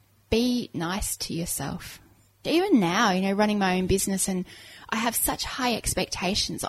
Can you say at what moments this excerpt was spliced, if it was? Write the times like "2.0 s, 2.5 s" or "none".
2.4 s